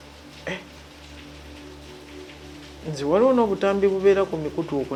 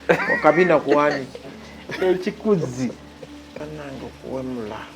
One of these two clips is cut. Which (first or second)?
second